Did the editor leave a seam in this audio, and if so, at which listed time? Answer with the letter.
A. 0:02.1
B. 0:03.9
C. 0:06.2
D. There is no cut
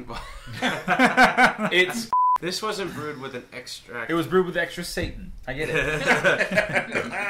A